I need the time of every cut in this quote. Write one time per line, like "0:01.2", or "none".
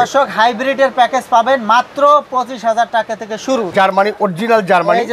0:03.7